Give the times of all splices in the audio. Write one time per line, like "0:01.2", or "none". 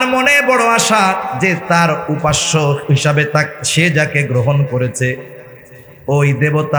none

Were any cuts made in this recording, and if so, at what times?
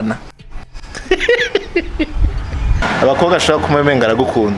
0:02.8

